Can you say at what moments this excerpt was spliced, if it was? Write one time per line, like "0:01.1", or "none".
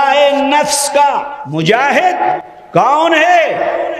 0:01.3
0:02.5